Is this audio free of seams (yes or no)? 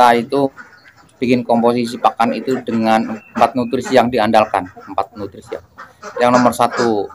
no